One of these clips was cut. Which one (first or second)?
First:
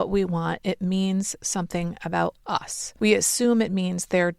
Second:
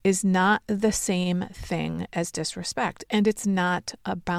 first